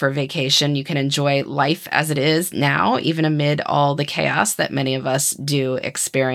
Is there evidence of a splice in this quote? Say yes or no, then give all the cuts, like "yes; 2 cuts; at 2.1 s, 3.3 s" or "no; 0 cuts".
no; 0 cuts